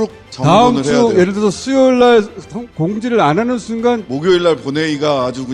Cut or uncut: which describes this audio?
uncut